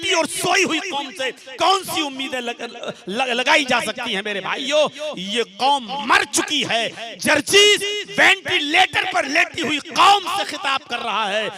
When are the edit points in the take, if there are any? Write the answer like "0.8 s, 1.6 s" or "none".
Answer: none